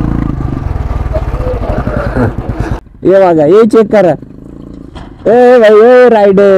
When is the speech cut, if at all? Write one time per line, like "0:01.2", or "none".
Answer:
none